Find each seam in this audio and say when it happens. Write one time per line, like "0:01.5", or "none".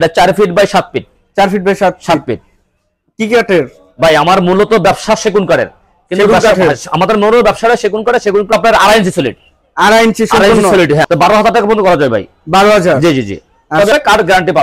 0:08.5
0:11.1
0:13.9